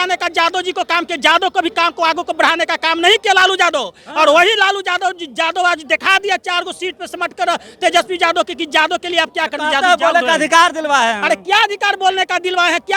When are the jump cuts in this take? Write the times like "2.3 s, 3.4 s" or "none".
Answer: none